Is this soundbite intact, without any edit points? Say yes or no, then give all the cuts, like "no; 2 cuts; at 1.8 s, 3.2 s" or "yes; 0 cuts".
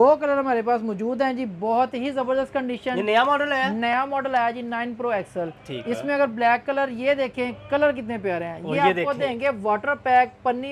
yes; 0 cuts